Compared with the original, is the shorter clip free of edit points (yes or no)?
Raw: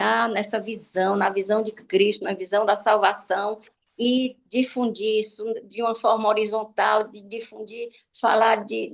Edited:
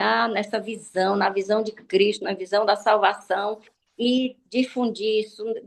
yes